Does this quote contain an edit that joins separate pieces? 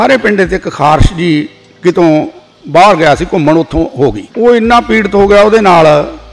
yes; 1 cut; at 4.2 s

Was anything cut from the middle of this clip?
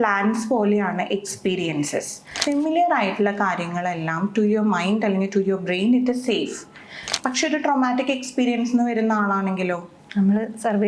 yes; 2 cuts; at 2.4 s, 7.0 s

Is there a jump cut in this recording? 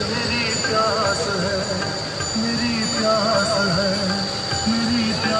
no; 0 cuts

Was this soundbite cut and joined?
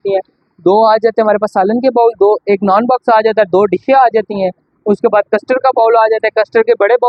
no; 0 cuts

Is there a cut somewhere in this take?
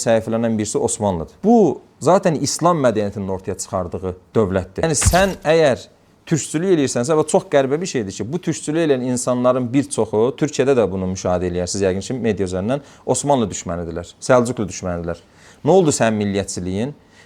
no; 0 cuts

